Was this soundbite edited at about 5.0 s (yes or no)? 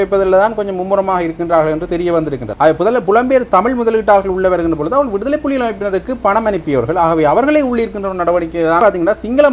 no